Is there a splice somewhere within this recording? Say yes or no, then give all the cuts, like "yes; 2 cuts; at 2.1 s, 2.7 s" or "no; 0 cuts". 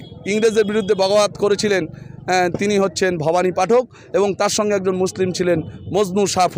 no; 0 cuts